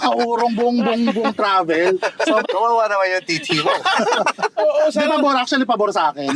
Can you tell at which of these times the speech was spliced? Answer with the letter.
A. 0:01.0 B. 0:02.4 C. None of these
B